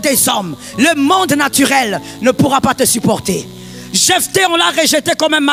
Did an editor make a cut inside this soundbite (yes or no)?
no